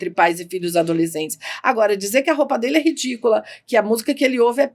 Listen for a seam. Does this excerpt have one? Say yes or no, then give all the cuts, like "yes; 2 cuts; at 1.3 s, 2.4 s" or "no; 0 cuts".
no; 0 cuts